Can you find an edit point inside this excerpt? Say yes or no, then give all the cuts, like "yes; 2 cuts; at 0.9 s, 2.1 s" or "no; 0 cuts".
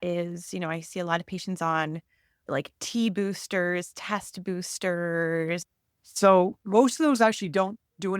yes; 2 cuts; at 5.7 s, 6.6 s